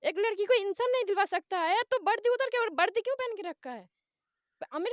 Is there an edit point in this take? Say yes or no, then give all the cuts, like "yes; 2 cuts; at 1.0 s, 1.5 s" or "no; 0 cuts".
no; 0 cuts